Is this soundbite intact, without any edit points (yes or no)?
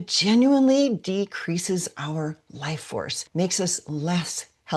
yes